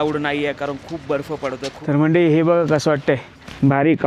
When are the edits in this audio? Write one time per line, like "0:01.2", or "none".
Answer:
0:01.8